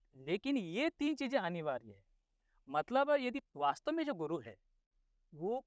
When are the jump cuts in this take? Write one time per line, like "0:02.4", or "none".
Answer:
0:03.5